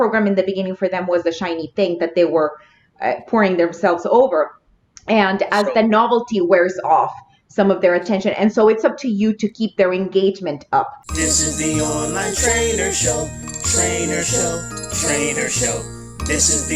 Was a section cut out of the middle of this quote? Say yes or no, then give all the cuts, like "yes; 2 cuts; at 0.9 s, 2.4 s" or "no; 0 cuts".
yes; 1 cut; at 11.0 s